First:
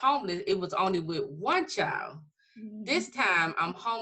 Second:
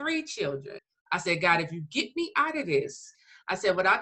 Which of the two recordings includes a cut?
second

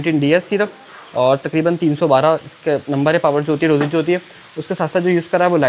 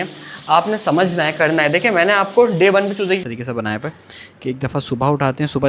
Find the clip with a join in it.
second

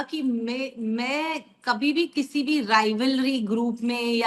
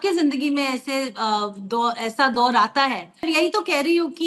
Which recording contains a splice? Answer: second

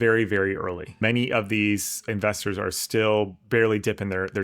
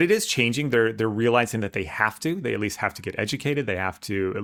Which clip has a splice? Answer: first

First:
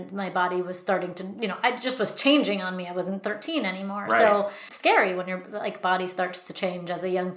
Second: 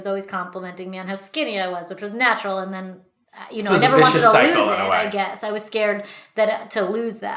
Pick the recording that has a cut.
first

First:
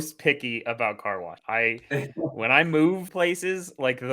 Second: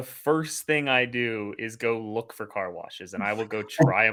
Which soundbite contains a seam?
first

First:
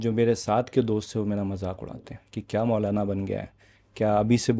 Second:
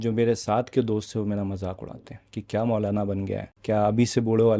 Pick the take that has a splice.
second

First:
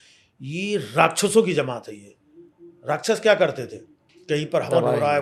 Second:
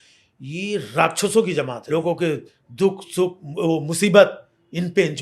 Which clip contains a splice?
second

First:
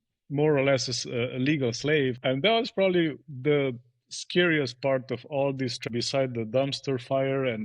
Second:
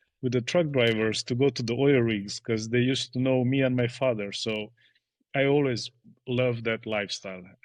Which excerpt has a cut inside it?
first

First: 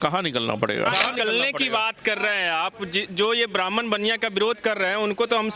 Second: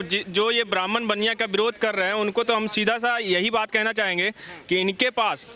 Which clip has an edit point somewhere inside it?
first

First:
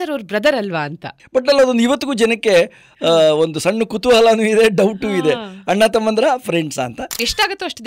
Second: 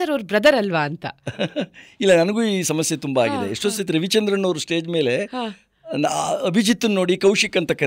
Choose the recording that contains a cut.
first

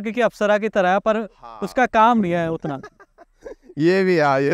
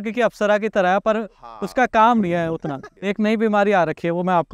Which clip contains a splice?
second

